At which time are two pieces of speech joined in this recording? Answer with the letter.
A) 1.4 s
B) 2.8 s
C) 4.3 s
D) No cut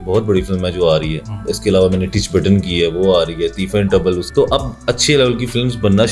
C